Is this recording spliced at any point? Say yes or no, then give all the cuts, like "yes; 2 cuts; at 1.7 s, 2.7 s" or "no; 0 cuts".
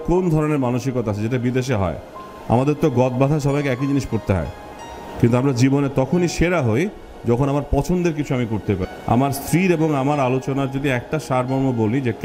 yes; 1 cut; at 8.8 s